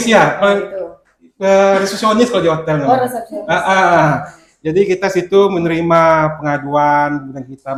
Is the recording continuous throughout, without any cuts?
yes; 0 cuts

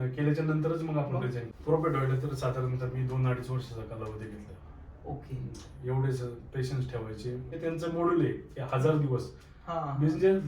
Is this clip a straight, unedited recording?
no; 2 cuts; at 1.4 s, 7.5 s

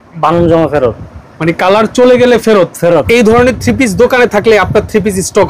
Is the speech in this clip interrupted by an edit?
yes; 1 cut; at 3.1 s

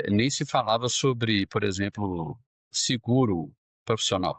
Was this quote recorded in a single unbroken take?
yes; 0 cuts

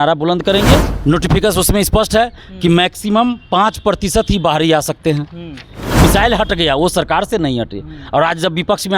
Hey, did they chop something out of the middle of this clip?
yes; 2 cuts; at 0.9 s, 6.0 s

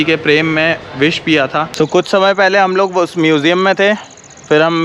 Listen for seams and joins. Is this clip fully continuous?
no; 1 cut; at 1.7 s

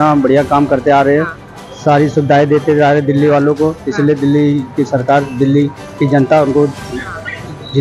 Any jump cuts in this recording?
no; 0 cuts

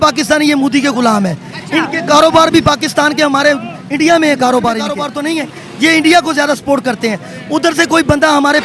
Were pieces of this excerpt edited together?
yes; 1 cut; at 5.1 s

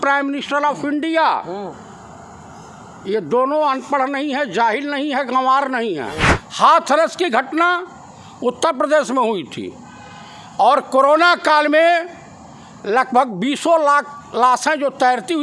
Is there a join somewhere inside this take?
yes; 1 cut; at 6.4 s

